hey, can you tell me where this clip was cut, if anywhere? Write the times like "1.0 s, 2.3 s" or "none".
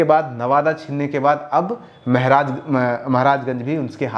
none